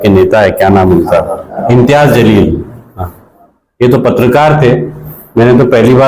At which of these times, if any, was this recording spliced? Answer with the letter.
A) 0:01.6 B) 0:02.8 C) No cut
A